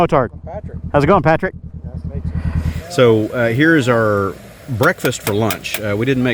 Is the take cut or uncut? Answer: cut